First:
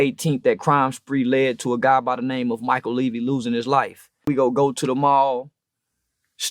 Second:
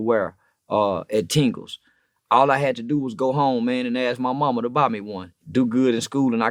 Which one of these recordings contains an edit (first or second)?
first